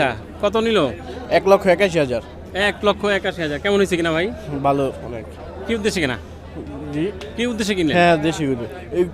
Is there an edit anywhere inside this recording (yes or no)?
no